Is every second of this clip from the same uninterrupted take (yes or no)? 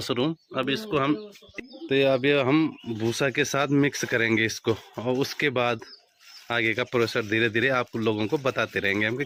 yes